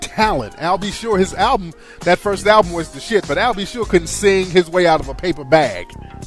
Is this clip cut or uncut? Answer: uncut